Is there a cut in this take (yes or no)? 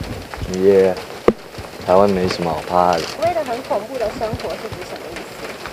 yes